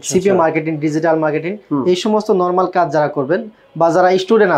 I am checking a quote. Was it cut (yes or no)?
no